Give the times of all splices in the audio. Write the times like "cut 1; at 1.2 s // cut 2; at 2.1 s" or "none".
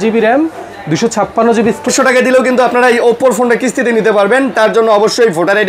cut 1; at 1.9 s